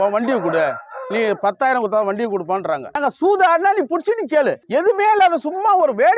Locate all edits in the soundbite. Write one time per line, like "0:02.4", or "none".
0:03.0
0:04.6